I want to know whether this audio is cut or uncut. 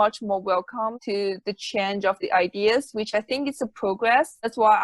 uncut